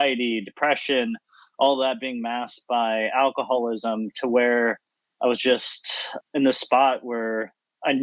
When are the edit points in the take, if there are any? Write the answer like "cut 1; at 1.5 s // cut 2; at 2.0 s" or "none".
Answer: cut 1; at 6.1 s